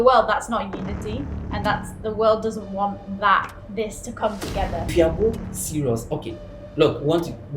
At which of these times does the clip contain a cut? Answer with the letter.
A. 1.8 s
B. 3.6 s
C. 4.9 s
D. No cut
C